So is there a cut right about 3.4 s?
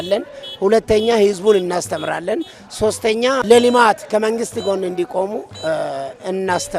yes; 1 cut; at 3.4 s

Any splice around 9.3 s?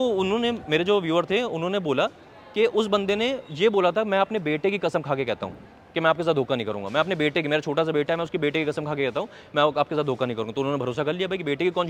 no; 0 cuts

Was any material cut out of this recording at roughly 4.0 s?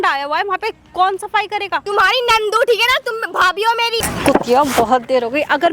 yes; 2 cuts; at 1.8 s, 4.0 s

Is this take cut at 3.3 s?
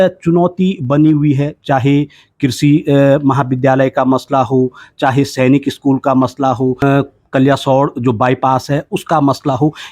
no; 1 cut; at 6.8 s

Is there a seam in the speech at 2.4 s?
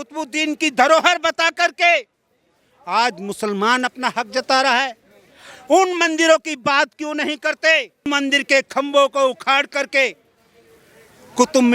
no; 1 cut; at 8.1 s

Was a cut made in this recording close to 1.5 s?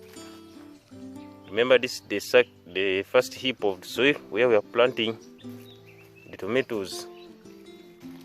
yes; 2 cuts; at 1.5 s, 6.9 s

